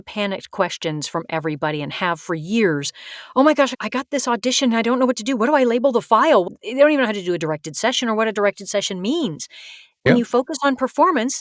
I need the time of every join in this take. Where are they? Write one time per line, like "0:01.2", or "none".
0:06.5